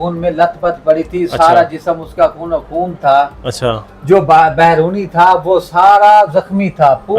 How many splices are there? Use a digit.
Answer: 0